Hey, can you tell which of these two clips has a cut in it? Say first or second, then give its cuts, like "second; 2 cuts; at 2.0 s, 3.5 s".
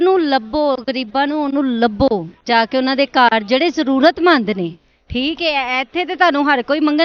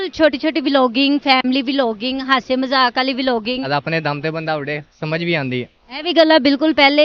second; 1 cut; at 3.7 s